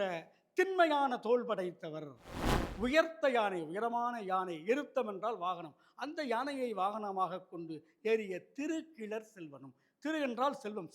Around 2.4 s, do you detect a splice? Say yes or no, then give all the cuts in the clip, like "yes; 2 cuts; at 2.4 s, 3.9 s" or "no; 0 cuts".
yes; 1 cut; at 2.4 s